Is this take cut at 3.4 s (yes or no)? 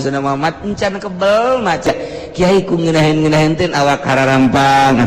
no